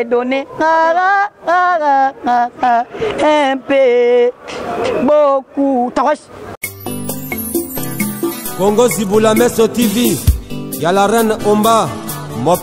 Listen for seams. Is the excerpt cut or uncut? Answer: cut